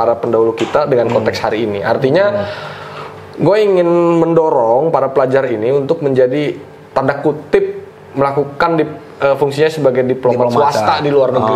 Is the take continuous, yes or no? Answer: yes